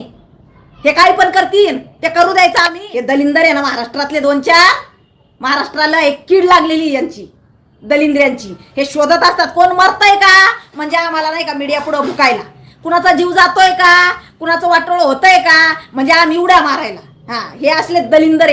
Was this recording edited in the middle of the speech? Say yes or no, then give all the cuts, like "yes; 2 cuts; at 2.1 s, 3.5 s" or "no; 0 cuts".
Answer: yes; 1 cut; at 2.8 s